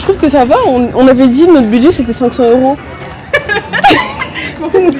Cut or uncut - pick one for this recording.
uncut